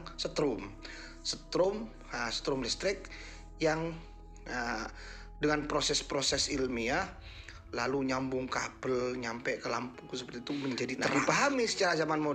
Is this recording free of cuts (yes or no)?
no